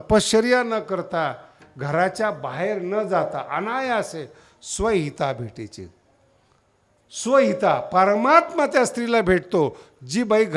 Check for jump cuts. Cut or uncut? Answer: uncut